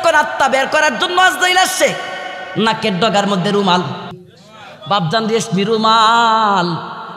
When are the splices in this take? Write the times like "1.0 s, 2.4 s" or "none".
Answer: 4.1 s